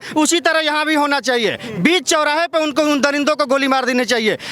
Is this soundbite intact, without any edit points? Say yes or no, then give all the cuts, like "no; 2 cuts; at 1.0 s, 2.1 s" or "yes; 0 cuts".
yes; 0 cuts